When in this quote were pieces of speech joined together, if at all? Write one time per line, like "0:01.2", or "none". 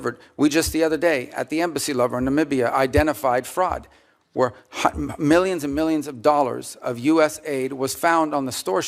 none

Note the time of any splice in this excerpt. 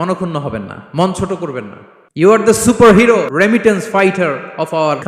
0:02.2
0:03.3

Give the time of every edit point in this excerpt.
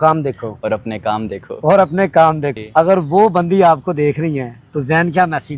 0:02.5

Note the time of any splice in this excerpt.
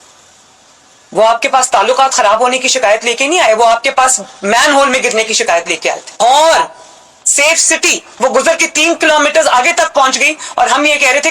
0:08.0
0:10.4

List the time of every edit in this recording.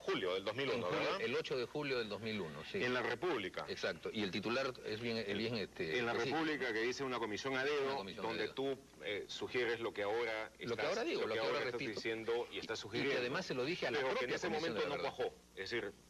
none

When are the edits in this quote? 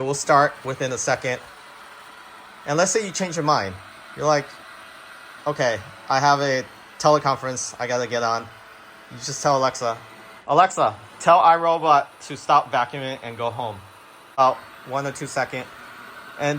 0:14.4

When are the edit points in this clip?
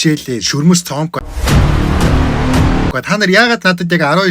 0:01.3
0:03.0

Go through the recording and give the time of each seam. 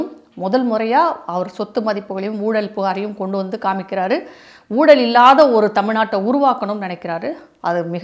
none

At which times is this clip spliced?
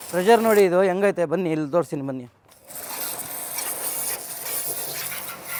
none

